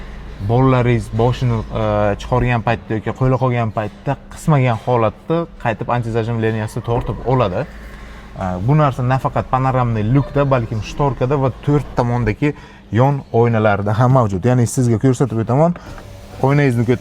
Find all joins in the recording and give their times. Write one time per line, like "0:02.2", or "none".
none